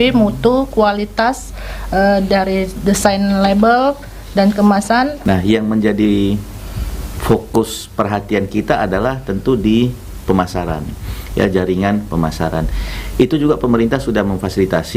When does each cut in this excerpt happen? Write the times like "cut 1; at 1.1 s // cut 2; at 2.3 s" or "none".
cut 1; at 5.2 s